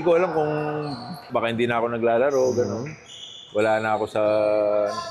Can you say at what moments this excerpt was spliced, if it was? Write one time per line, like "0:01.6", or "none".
0:01.3